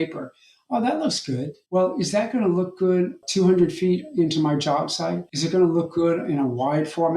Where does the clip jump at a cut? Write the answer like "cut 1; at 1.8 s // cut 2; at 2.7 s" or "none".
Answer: cut 1; at 3.2 s // cut 2; at 5.3 s